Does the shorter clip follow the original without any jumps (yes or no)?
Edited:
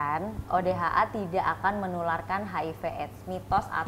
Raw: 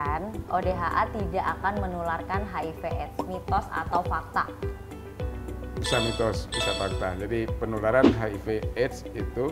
yes